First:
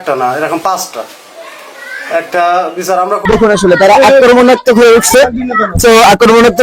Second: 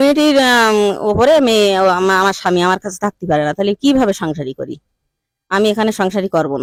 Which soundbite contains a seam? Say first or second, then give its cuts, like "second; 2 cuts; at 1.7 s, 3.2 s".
first; 1 cut; at 3.2 s